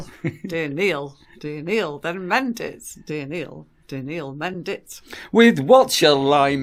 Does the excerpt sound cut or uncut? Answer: uncut